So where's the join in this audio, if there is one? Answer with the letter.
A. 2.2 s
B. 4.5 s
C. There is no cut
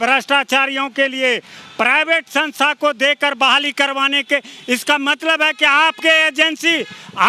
C